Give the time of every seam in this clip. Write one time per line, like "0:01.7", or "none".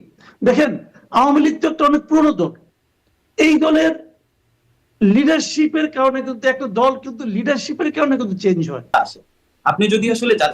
0:08.9